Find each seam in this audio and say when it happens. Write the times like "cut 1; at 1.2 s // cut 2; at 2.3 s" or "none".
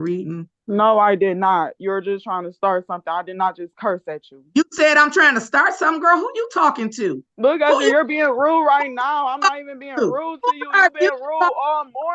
cut 1; at 7.3 s